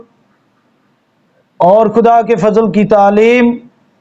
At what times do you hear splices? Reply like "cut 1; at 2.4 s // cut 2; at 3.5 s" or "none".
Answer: none